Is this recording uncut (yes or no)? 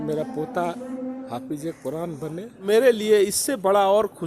no